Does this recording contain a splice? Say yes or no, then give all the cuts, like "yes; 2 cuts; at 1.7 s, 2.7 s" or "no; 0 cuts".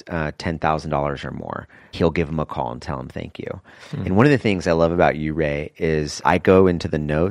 yes; 2 cuts; at 1.9 s, 6.1 s